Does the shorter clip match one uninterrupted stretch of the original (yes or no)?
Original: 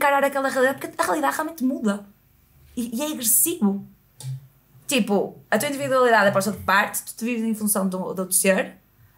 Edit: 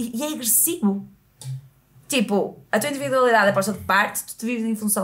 yes